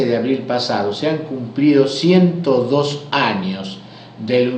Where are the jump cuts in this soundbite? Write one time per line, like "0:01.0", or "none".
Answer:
0:02.3